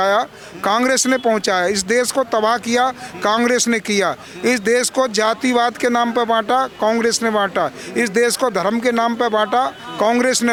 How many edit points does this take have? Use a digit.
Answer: 0